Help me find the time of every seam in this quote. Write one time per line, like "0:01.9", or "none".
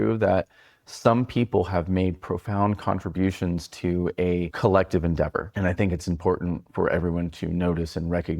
0:04.5
0:05.5